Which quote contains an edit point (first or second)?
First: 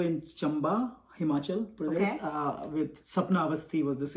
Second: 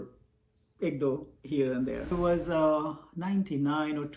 second